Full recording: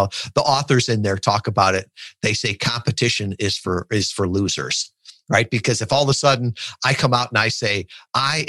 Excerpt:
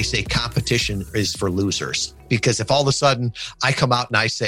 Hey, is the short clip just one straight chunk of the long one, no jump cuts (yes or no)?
no